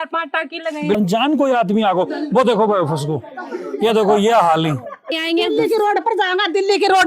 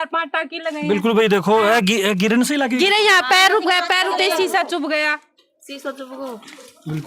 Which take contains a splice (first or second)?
first